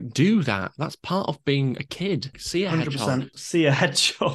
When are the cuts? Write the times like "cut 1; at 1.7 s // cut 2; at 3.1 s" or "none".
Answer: cut 1; at 2.4 s